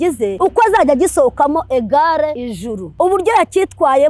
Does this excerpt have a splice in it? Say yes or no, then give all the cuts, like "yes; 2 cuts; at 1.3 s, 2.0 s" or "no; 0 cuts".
yes; 1 cut; at 2.5 s